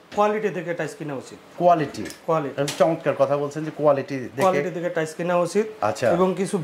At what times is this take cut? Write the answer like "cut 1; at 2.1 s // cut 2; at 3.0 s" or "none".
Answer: none